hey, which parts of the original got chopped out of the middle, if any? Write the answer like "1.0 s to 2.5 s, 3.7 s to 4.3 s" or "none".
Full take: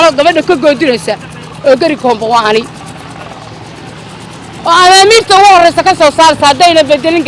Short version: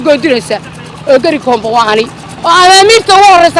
2.8 s to 4.5 s